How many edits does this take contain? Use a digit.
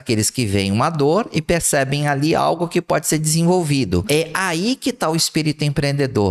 1